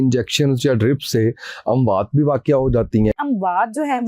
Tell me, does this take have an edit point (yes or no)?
yes